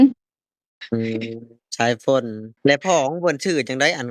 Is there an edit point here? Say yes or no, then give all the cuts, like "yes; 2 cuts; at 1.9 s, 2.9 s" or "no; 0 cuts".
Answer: yes; 1 cut; at 2.4 s